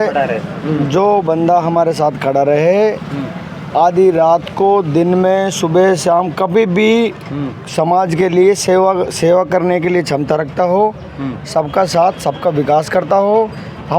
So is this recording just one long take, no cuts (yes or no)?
yes